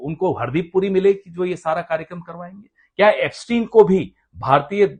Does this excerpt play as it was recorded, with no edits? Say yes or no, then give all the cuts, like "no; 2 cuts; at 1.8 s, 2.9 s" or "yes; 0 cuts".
yes; 0 cuts